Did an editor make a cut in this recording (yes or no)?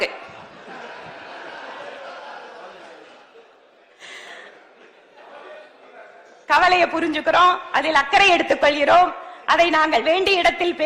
no